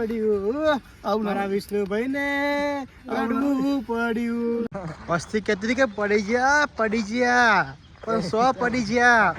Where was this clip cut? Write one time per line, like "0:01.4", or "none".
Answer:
0:04.7

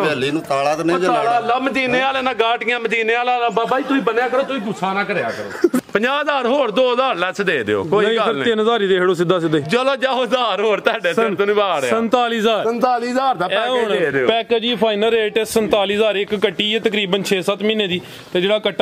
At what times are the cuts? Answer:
0:05.8

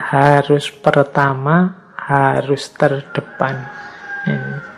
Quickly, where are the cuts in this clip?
none

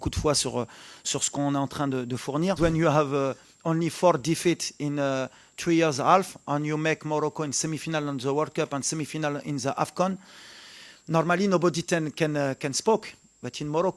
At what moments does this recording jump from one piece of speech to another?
0:02.6

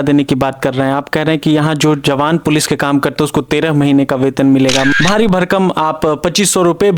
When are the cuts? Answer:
0:04.9

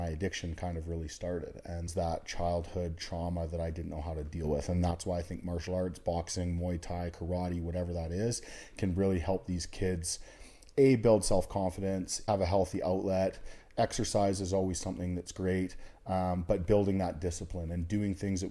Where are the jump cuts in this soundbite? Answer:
0:01.9
0:12.2

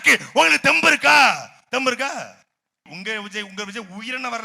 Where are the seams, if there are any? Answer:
0:02.8

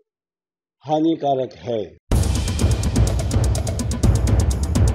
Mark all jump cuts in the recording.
0:02.0

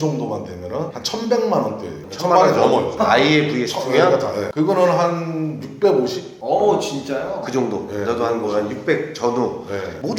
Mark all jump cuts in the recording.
0:01.0
0:02.9
0:04.5

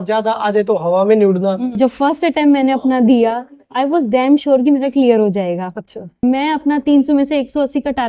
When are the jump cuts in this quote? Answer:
0:01.7
0:06.1

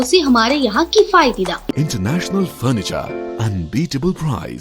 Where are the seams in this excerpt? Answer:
0:01.7

